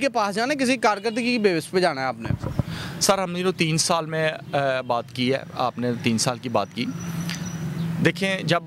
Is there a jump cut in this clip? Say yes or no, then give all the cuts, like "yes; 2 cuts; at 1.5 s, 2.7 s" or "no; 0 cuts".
no; 0 cuts